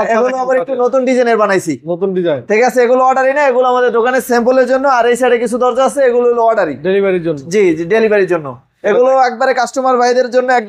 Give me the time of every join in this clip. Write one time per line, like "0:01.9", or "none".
none